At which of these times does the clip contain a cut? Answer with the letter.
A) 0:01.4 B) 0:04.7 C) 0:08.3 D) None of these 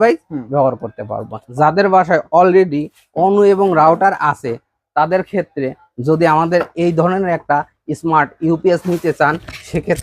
A